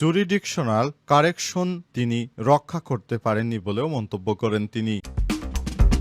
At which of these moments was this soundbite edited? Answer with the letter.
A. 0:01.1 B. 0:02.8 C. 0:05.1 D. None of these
C